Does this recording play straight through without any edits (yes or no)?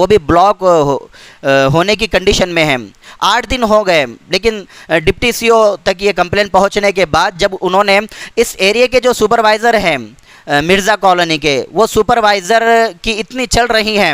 yes